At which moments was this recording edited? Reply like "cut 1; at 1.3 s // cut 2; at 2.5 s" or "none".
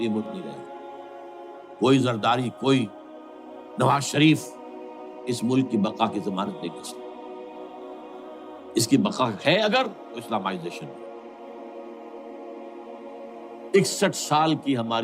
cut 1; at 10.7 s // cut 2; at 12.8 s // cut 3; at 13.7 s